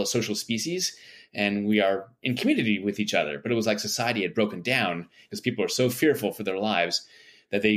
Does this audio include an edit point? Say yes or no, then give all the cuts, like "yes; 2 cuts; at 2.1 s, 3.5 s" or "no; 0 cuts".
yes; 1 cut; at 5.3 s